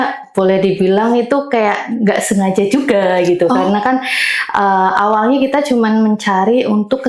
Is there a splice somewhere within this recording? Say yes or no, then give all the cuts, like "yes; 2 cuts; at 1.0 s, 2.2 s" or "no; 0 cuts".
no; 0 cuts